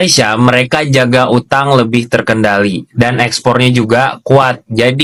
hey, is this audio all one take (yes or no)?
yes